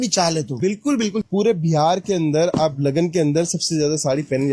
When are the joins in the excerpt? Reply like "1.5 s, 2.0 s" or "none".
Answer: 1.2 s